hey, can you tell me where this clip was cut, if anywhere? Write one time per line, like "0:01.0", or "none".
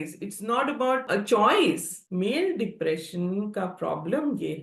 0:01.0
0:01.9